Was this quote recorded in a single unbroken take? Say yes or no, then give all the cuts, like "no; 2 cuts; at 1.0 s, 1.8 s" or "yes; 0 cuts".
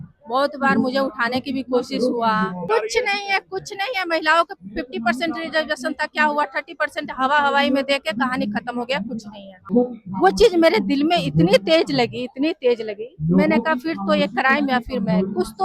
no; 2 cuts; at 2.7 s, 9.7 s